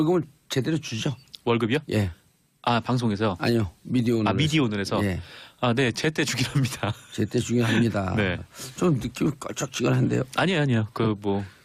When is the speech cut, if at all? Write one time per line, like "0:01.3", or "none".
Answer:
none